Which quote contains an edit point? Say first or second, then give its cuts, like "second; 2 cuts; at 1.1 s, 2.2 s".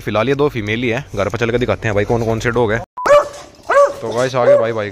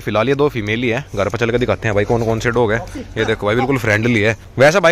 first; 1 cut; at 3.1 s